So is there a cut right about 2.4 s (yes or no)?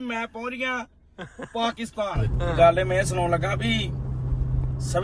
yes